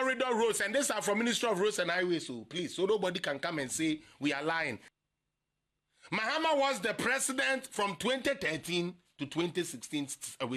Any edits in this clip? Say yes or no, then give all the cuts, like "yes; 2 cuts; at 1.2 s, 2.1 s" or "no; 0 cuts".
yes; 1 cut; at 4.9 s